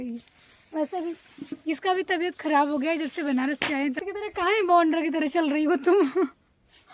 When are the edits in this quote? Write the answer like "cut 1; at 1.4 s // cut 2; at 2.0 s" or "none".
cut 1; at 4.0 s

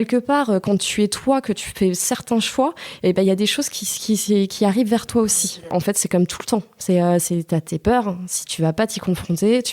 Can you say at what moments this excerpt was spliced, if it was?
cut 1; at 5.7 s

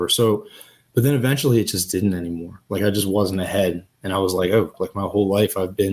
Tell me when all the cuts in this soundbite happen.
cut 1; at 4.8 s

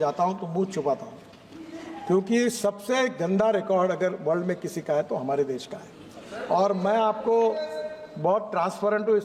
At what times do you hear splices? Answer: none

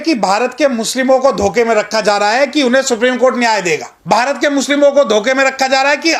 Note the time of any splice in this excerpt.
cut 1; at 3.9 s

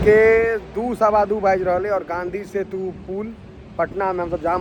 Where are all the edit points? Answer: none

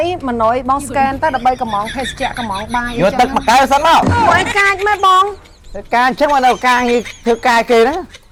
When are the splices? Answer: none

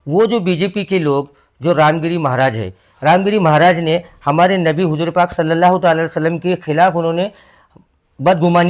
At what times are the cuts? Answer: none

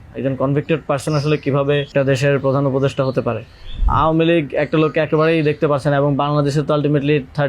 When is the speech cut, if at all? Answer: cut 1; at 1.9 s // cut 2; at 3.8 s

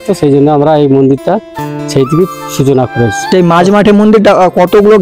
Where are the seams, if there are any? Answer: cut 1; at 3.3 s

